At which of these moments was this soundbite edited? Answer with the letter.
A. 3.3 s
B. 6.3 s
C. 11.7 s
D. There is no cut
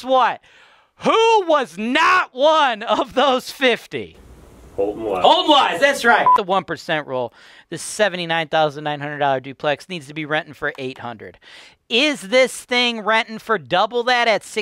B